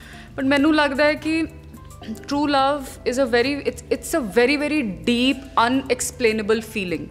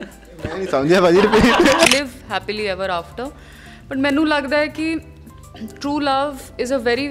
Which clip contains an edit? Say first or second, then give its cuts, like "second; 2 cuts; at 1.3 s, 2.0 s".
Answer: second; 1 cut; at 1.9 s